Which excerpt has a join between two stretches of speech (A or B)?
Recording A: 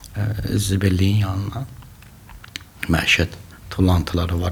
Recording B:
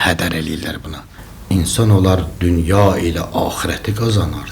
B